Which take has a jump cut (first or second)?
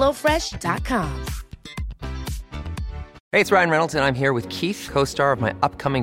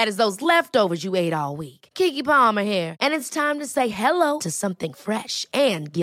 first